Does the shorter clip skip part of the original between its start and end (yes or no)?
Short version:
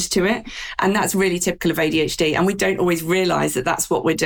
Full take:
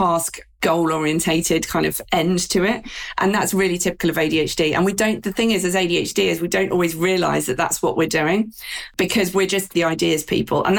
yes